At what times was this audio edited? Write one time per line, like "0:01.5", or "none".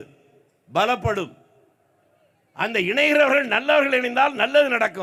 none